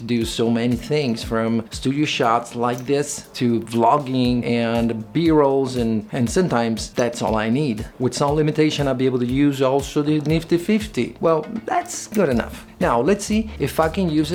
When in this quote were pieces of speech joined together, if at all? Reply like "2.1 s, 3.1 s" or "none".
none